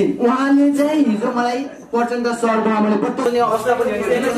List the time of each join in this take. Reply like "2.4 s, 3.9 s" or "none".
3.3 s